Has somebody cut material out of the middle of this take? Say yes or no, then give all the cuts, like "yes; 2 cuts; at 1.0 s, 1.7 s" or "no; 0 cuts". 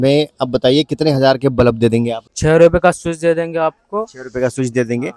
yes; 1 cut; at 2.2 s